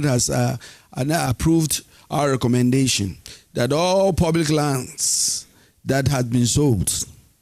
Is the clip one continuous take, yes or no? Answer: yes